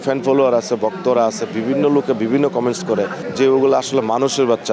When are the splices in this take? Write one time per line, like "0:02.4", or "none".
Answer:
none